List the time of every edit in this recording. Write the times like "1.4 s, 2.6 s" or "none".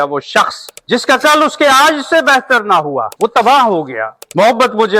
4.1 s